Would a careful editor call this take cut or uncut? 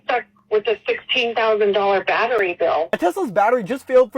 cut